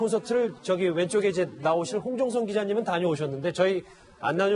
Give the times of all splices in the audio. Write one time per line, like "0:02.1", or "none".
0:02.8